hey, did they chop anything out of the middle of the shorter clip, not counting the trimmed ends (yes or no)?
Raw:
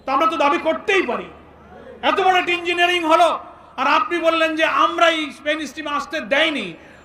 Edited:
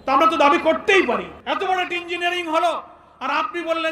yes